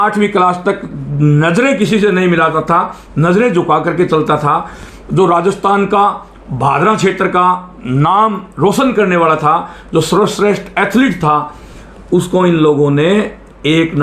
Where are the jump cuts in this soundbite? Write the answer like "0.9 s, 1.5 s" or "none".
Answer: none